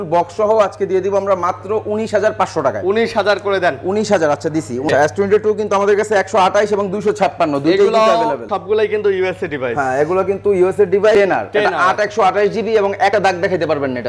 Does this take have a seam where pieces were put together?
yes; 4 cuts; at 4.9 s, 8.5 s, 11.1 s, 13.1 s

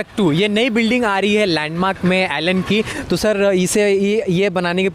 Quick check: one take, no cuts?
no; 1 cut; at 2.9 s

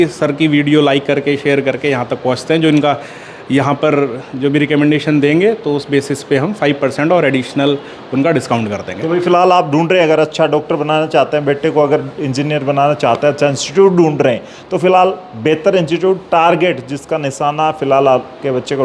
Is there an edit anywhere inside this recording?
no; 0 cuts

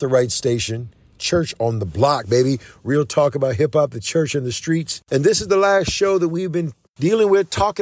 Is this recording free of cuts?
no; 3 cuts; at 1.2 s, 5.0 s, 6.8 s

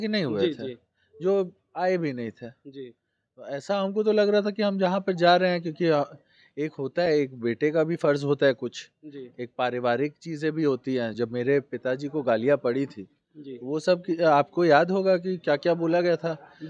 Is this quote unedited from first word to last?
yes; 0 cuts

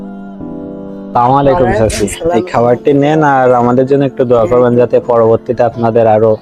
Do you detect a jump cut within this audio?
yes; 1 cut; at 0.9 s

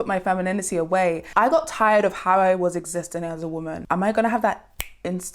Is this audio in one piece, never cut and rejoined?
no; 2 cuts; at 1.3 s, 3.8 s

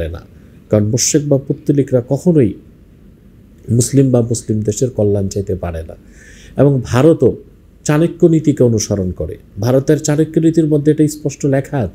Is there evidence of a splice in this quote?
no; 0 cuts

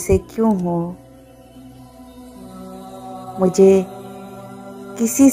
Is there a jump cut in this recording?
yes; 2 cuts; at 1.0 s, 3.1 s

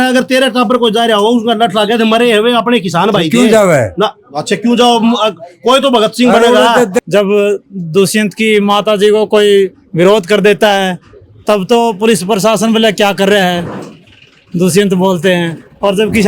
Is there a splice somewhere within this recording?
yes; 1 cut; at 7.0 s

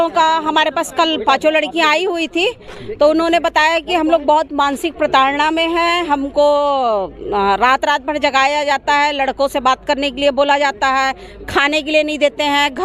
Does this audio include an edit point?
no; 0 cuts

